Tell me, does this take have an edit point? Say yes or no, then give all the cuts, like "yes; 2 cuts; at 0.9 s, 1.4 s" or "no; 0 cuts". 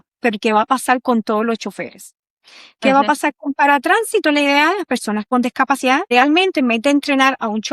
yes; 1 cut; at 6.1 s